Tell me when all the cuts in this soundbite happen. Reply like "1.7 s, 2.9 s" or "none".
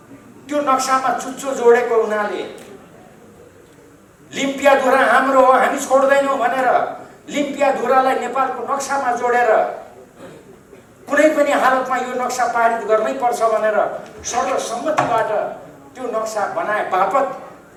none